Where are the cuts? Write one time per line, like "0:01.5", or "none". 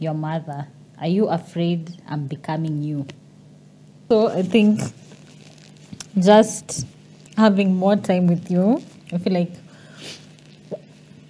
0:04.0